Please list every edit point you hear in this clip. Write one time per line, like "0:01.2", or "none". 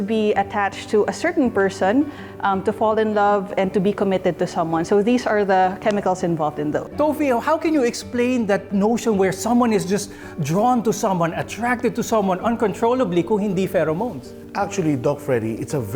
none